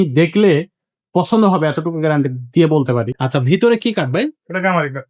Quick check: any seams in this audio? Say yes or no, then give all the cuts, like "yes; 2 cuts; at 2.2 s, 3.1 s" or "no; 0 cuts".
yes; 1 cut; at 3.2 s